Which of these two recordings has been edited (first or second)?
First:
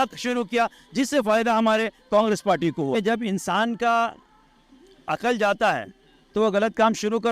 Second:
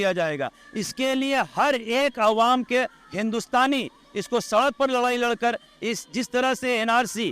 first